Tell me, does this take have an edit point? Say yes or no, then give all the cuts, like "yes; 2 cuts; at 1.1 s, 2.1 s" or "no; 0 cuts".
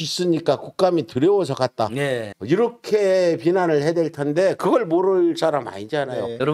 no; 0 cuts